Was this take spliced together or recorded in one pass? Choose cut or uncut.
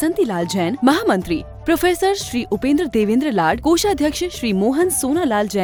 uncut